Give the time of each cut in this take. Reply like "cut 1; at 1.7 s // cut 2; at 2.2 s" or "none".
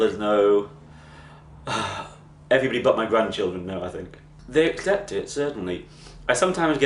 none